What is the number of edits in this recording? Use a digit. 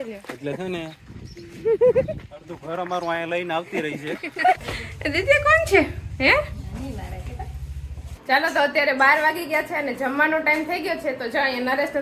0